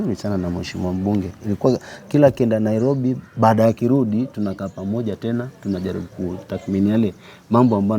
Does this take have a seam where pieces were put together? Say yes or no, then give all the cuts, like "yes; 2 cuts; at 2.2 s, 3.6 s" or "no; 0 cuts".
no; 0 cuts